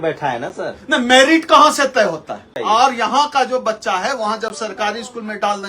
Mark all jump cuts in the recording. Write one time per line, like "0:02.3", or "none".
0:02.5

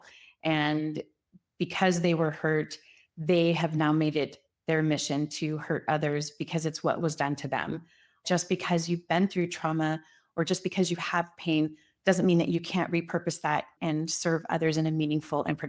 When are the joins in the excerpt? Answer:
0:08.2
0:13.8

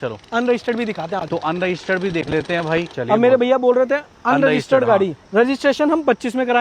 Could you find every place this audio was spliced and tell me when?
0:02.9
0:05.3

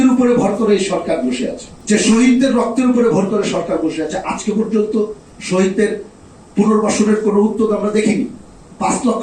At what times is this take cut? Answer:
0:01.7

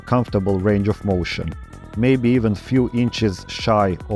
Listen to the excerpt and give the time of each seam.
0:01.6

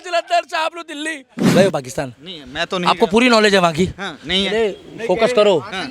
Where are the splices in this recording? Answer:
0:01.5

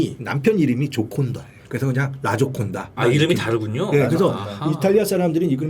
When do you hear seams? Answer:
0:02.8

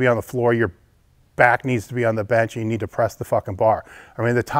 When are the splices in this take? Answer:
none

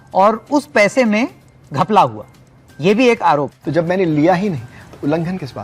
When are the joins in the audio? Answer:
0:03.6

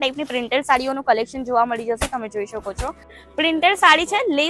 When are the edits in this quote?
0:03.2

